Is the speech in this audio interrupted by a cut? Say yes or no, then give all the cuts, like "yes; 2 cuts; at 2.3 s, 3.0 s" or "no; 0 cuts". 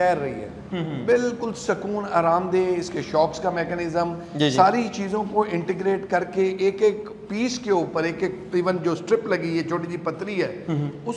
no; 0 cuts